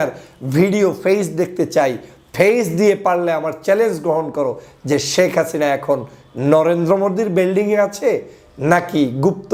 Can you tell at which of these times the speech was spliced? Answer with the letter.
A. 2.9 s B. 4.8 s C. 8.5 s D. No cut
D